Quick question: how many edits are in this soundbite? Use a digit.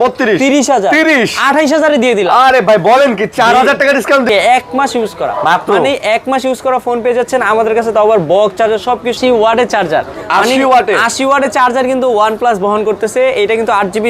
2